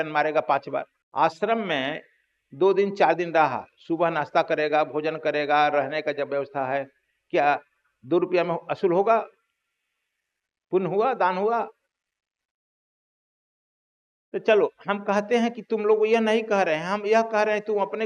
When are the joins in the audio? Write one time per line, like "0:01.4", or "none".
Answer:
0:01.0